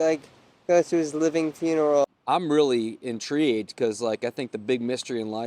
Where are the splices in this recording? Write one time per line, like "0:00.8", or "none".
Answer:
0:02.0